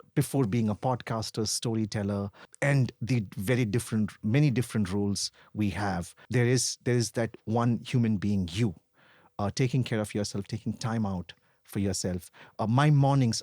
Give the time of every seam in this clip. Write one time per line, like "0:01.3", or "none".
0:02.4
0:06.2